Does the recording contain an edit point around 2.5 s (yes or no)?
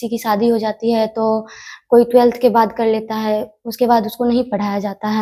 no